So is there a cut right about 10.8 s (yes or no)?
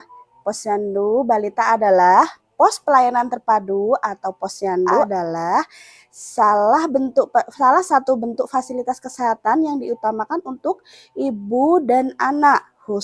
no